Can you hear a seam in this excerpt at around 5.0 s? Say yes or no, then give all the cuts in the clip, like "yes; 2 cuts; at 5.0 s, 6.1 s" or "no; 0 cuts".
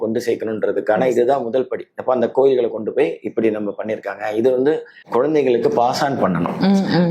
yes; 1 cut; at 5.0 s